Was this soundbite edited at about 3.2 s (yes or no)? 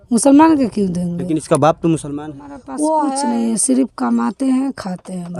yes